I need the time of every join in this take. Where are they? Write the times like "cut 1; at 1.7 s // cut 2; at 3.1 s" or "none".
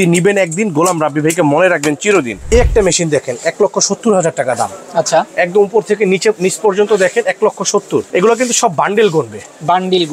cut 1; at 2.5 s // cut 2; at 8.1 s